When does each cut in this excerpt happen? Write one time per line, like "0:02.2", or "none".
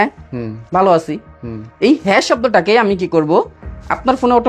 none